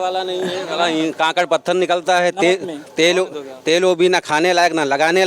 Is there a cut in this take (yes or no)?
no